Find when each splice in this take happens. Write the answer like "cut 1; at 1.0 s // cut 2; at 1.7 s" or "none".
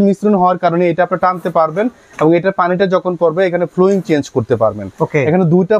none